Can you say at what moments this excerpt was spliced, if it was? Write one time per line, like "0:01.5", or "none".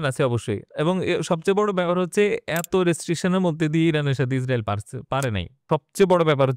0:05.6